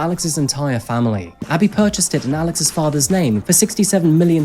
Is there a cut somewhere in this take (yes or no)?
yes